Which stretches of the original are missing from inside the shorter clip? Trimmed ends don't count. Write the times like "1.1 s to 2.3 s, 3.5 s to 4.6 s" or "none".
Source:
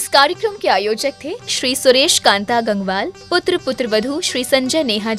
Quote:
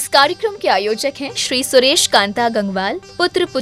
1.3 s to 1.4 s